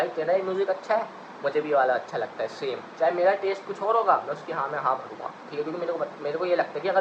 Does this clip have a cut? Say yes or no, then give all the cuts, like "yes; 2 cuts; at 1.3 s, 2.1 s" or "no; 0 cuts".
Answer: no; 0 cuts